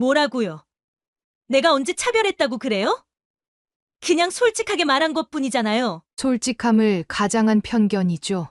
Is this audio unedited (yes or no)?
yes